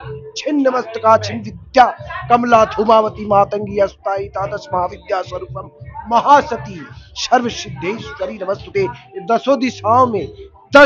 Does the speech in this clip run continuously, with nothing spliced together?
yes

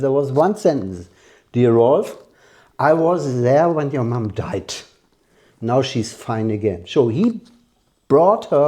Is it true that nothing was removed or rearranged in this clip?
yes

